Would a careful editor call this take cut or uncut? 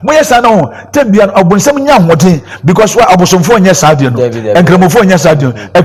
uncut